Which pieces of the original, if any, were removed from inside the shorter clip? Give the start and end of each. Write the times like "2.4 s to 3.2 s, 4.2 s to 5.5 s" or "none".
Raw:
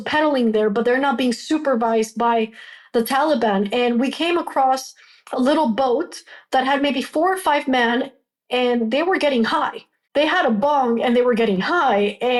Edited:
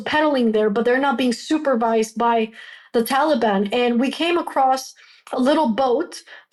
none

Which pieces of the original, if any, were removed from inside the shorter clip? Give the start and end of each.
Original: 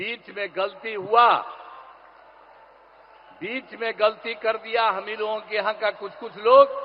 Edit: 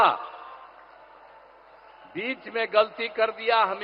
none

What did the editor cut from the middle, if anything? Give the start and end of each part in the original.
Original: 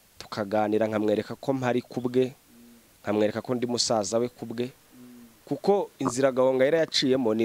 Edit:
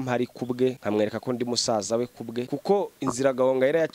2.3 s to 3.0 s, 4.7 s to 5.5 s

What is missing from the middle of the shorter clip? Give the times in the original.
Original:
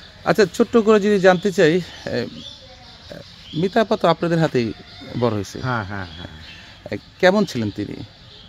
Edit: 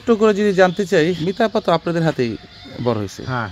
1.8 s to 3.6 s

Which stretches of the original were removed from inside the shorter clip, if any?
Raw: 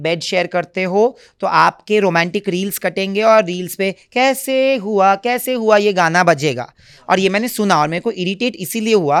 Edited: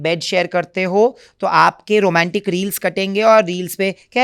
none

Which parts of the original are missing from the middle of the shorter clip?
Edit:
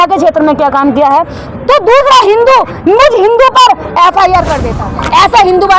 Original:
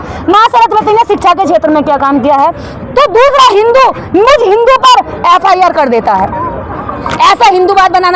5.9 s to 6.7 s

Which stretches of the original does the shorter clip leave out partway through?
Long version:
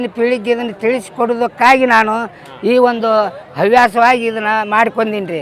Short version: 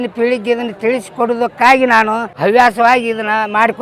2.3 s to 3.5 s

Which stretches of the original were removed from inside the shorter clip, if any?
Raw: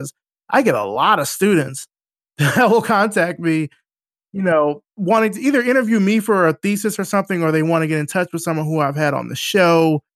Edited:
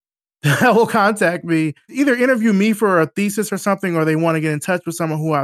3.8 s to 5.4 s

